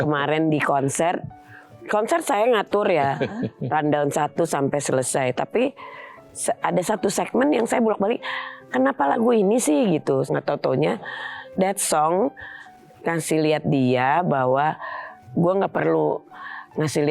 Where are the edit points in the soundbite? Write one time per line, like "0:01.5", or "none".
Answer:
0:10.3